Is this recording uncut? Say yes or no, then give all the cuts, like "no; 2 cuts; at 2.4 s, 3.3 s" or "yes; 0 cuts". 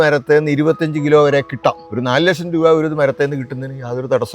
no; 1 cut; at 1.8 s